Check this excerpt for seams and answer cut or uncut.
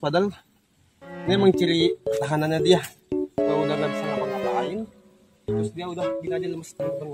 uncut